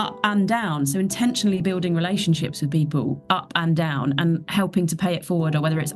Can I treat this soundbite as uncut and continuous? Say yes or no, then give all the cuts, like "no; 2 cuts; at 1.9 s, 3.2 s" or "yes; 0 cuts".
yes; 0 cuts